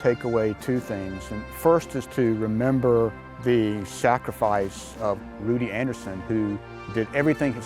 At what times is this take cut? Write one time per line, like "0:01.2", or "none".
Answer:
0:03.3
0:05.2
0:06.7